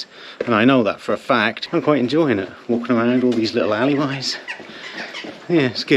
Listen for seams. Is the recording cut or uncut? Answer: cut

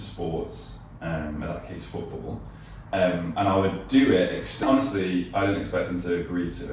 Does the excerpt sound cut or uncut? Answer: cut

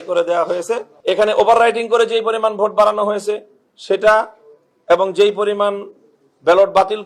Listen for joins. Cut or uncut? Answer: cut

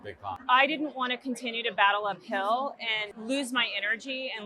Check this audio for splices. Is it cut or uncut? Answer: cut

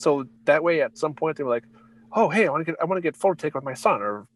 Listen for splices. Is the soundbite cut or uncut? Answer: uncut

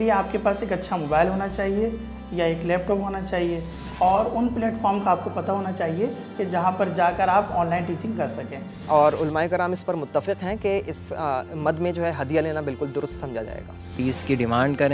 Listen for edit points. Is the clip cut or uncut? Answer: cut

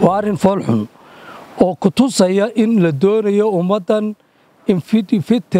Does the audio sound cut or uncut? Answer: uncut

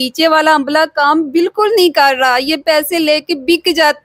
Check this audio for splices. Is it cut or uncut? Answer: uncut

